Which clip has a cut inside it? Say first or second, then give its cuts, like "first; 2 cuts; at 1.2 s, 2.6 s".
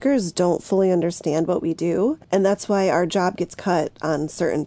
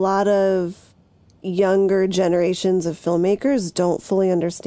first; 1 cut; at 2.2 s